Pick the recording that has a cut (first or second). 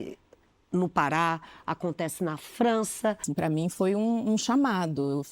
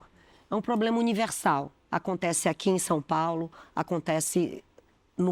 first